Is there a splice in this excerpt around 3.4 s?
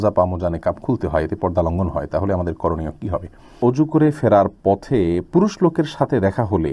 yes; 1 cut; at 3.4 s

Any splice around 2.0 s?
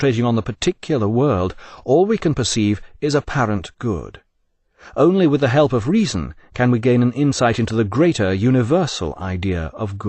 no; 1 cut; at 3.5 s

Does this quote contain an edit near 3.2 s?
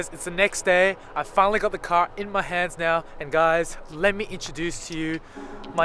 yes; 1 cut; at 3.2 s

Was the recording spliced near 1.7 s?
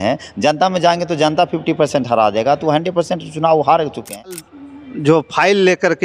no; 1 cut; at 4.3 s

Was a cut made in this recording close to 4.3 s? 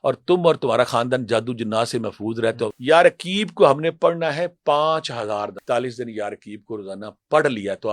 no; 2 cuts; at 2.7 s, 5.6 s

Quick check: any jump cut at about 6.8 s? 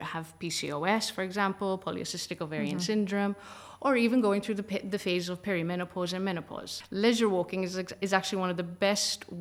yes; 1 cut; at 6.8 s

